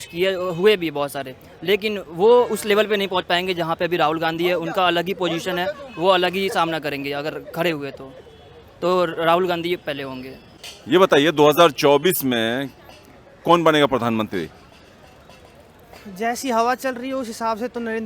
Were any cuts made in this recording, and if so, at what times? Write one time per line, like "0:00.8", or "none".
0:10.5